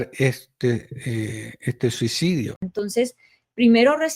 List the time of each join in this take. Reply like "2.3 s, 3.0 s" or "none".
2.7 s